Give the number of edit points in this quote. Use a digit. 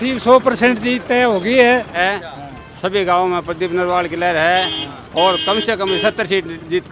1